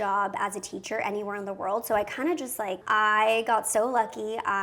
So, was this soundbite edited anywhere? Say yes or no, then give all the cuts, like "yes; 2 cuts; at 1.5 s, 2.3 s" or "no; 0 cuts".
yes; 1 cut; at 2.8 s